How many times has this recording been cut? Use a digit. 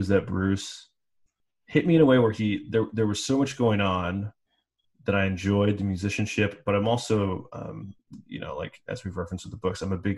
0